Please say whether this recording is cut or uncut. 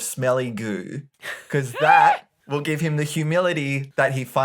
cut